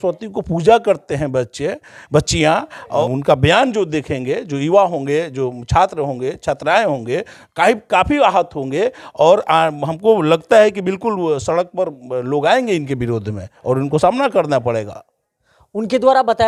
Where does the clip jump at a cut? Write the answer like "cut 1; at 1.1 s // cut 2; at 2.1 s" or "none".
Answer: none